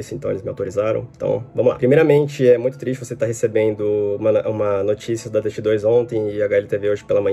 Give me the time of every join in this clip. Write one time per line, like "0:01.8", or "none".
none